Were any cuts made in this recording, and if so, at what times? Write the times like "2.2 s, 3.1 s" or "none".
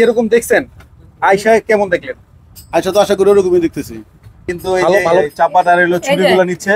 5.3 s